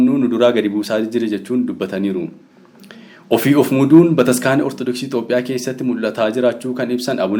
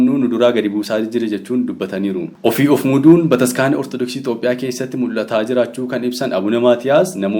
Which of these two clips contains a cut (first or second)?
second